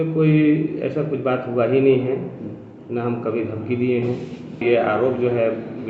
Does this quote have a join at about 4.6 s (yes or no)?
yes